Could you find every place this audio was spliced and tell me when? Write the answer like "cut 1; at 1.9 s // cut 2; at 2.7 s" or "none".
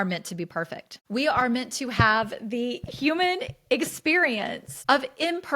cut 1; at 0.9 s // cut 2; at 4.7 s